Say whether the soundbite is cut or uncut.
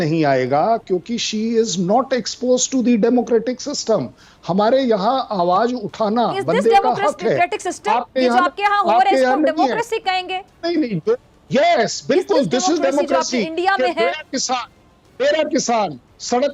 uncut